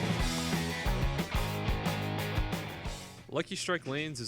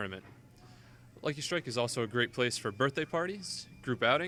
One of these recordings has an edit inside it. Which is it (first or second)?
first